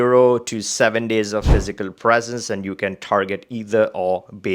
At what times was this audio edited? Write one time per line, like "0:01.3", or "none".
none